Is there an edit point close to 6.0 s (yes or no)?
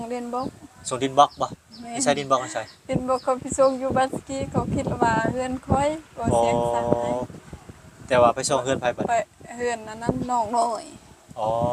no